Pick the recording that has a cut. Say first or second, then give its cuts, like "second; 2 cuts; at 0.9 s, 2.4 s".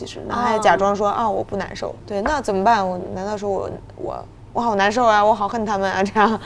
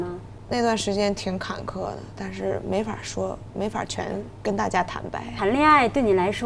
second; 1 cut; at 5.3 s